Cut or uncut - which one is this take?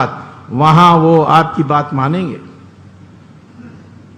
uncut